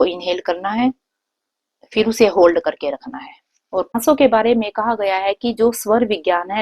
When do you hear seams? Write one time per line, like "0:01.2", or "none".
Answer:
0:03.9